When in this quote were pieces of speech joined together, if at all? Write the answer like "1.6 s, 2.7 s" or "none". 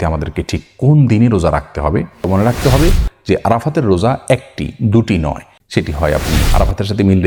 2.3 s, 5.5 s